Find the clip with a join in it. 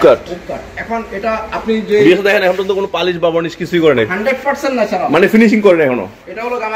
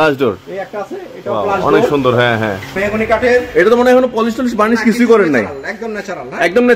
second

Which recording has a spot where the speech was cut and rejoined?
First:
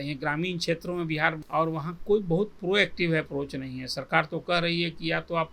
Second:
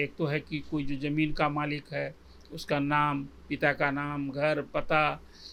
first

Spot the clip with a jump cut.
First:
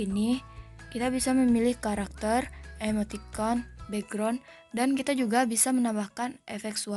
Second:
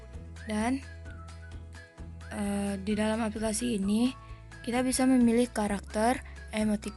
second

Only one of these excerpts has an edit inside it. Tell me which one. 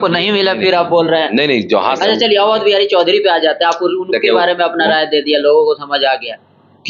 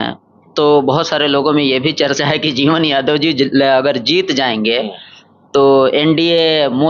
first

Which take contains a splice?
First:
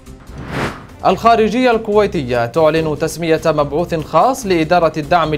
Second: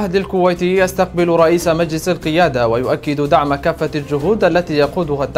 first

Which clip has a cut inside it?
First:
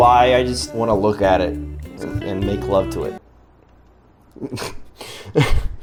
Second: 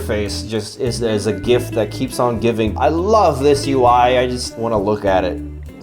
second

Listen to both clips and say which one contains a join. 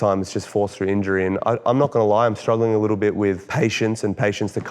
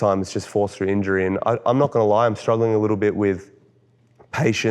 first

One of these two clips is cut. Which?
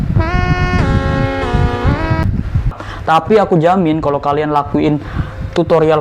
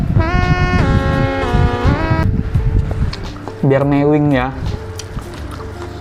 first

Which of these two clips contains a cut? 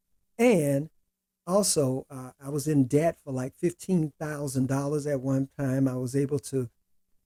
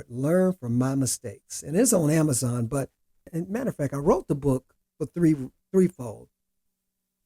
second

